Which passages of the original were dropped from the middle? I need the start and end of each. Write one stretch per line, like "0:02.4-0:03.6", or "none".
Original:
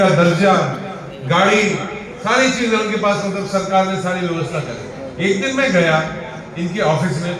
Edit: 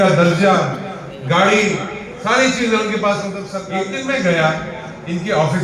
0:03.5-0:05.0